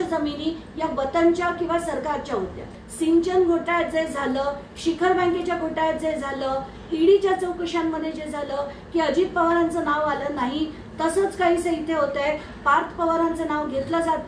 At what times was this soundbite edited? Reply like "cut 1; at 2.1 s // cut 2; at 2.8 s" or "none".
cut 1; at 2.8 s